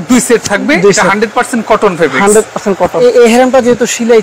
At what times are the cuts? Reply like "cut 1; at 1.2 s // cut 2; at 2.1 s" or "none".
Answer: cut 1; at 3.0 s